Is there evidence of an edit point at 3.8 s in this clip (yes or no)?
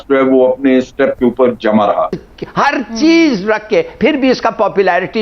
no